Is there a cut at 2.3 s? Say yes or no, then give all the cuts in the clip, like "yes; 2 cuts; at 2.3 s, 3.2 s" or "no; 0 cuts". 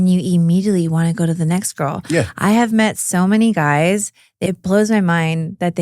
no; 1 cut; at 4.4 s